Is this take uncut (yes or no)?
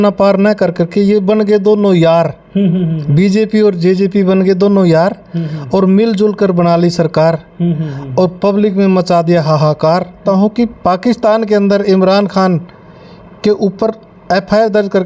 no